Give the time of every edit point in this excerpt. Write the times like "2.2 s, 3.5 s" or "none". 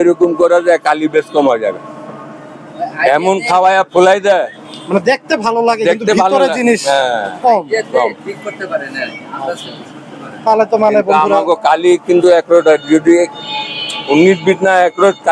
none